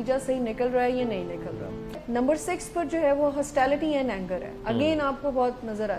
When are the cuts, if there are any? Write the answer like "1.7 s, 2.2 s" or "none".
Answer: 1.9 s